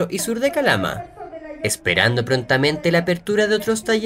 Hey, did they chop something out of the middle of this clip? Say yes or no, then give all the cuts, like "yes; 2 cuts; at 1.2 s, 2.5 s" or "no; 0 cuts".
yes; 1 cut; at 1.3 s